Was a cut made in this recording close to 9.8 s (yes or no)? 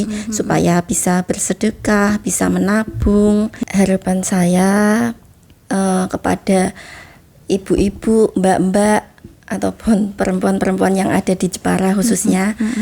no